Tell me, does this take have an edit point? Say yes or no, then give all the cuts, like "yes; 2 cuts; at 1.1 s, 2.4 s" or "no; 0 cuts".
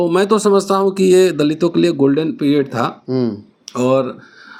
no; 0 cuts